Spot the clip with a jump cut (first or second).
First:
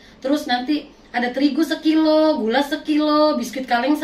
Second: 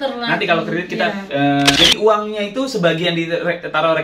second